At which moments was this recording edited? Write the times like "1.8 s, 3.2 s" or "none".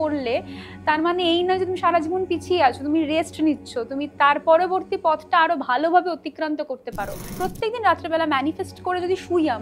7.3 s